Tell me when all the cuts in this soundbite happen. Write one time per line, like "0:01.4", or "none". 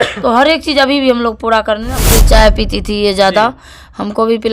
0:02.1